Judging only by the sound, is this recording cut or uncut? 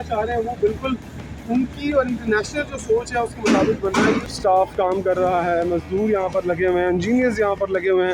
cut